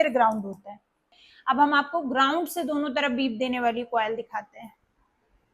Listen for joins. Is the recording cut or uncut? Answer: cut